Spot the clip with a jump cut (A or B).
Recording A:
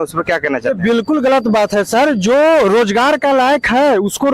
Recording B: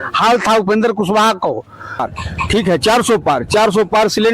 B